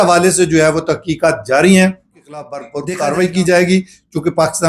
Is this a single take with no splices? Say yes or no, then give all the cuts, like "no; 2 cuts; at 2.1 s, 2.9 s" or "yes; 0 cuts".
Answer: no; 1 cut; at 2.6 s